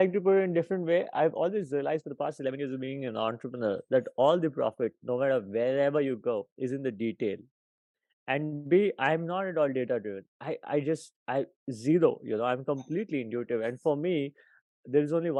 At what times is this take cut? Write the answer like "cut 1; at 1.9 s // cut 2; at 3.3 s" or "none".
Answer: none

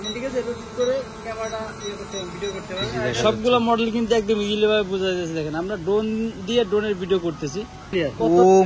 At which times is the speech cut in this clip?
cut 1; at 3.0 s // cut 2; at 7.9 s

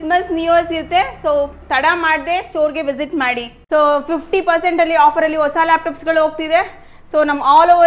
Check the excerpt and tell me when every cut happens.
cut 1; at 3.5 s

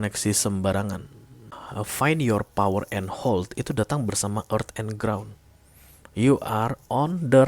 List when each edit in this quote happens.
cut 1; at 1.5 s

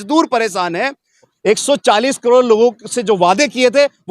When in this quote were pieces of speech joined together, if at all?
cut 1; at 1.3 s

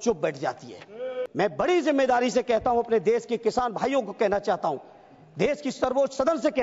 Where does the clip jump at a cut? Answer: cut 1; at 1.2 s

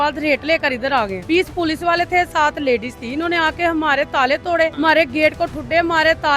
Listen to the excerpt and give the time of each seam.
cut 1; at 1.2 s // cut 2; at 4.7 s

